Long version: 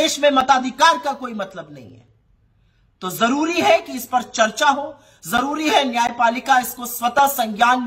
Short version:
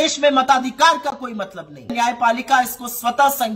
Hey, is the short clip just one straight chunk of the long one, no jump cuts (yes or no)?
no